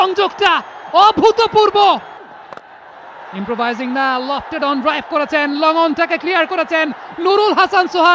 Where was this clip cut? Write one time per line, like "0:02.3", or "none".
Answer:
0:02.2